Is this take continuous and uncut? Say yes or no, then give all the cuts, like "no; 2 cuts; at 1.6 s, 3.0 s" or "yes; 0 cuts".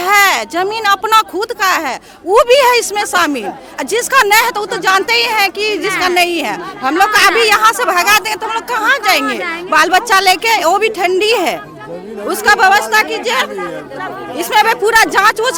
yes; 0 cuts